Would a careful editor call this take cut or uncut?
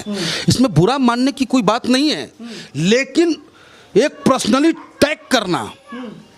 uncut